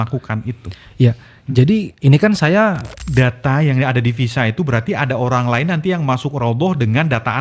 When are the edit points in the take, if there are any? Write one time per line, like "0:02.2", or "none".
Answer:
0:02.9